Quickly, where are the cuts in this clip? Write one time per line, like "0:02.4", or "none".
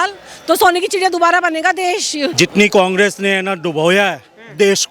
0:02.3